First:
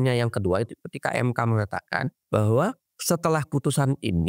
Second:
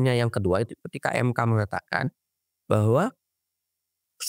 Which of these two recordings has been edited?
first; 2 cuts; at 2.2 s, 2.9 s

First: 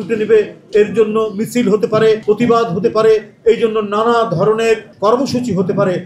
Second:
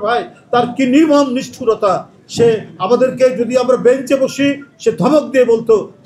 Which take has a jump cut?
first; 2 cuts; at 2.2 s, 4.9 s

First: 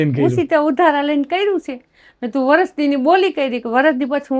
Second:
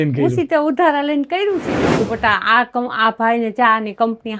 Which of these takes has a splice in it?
second; 1 cut; at 1.9 s

